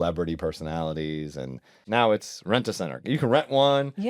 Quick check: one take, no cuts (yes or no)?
no